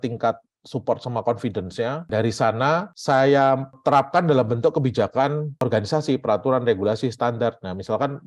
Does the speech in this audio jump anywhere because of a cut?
yes; 1 cut; at 2.1 s

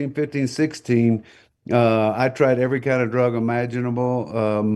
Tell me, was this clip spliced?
no; 0 cuts

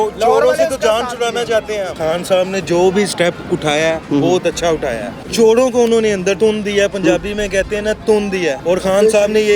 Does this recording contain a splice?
yes; 4 cuts; at 1.9 s, 5.2 s, 6.4 s, 8.6 s

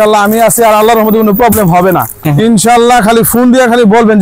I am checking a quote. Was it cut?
yes; 1 cut; at 2.1 s

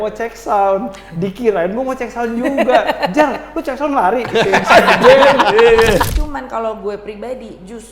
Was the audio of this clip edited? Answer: yes; 1 cut; at 6.1 s

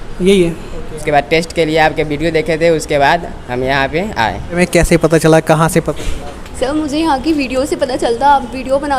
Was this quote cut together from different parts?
yes; 2 cuts; at 1.0 s, 4.6 s

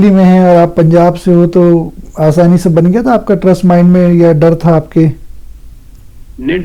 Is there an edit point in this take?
no; 0 cuts

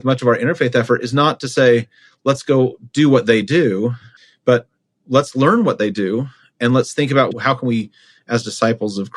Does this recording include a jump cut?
yes; 2 cuts; at 4.1 s, 7.3 s

